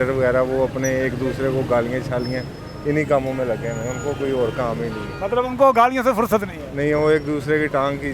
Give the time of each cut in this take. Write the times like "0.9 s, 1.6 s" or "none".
none